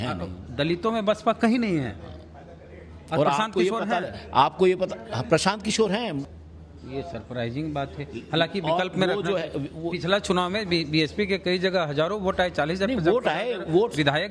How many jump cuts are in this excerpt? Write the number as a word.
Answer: zero